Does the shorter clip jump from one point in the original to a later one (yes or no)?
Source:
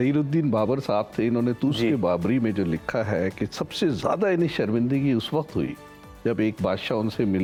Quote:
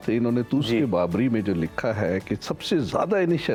no